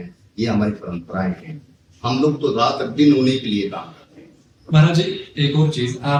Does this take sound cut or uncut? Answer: uncut